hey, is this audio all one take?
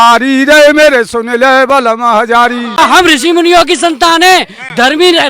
no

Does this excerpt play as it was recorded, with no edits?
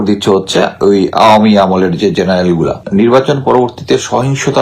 no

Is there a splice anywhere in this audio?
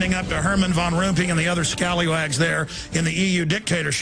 yes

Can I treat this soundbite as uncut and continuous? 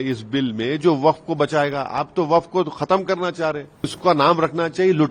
no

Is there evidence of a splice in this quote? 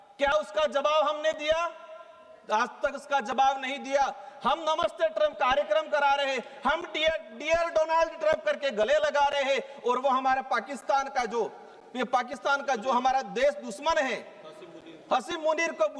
no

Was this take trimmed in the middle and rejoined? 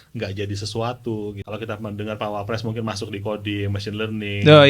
yes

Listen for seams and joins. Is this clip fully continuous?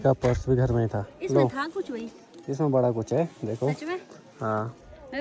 yes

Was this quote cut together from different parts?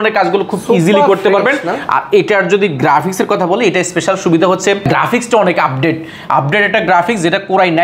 no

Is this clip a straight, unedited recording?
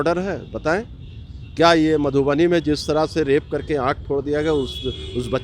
yes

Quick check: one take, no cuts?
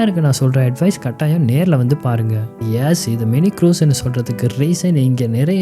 no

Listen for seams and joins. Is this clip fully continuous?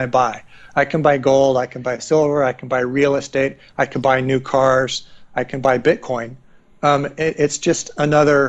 yes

